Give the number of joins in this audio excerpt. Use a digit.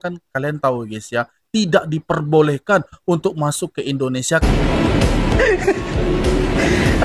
1